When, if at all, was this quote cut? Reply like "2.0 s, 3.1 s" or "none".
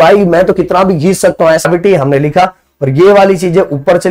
1.6 s